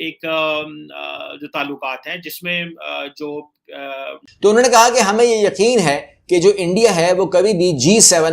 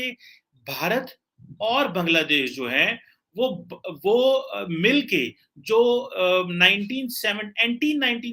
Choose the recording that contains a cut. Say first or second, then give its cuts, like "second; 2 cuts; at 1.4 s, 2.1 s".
first; 1 cut; at 4.2 s